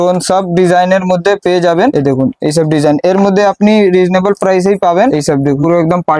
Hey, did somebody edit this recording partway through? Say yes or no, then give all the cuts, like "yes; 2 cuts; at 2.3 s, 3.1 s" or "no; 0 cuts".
no; 0 cuts